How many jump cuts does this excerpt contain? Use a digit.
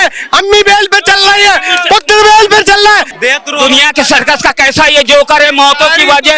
1